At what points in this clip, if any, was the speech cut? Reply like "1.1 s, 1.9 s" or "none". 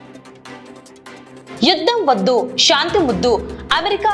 1.5 s